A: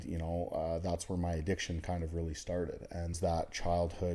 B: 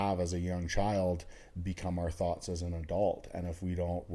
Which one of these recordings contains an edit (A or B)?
A